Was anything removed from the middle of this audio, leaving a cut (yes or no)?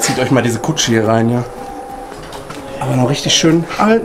yes